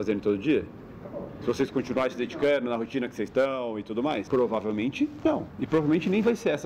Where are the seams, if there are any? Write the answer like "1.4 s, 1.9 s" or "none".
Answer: 4.3 s, 5.5 s